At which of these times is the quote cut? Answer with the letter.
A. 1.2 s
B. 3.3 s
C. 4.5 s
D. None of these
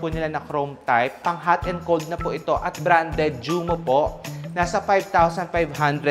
D